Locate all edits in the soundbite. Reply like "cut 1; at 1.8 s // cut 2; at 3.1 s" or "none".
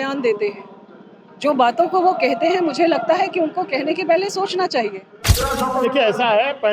cut 1; at 5.4 s